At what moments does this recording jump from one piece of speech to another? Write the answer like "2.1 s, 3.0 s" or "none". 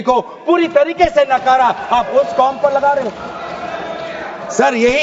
none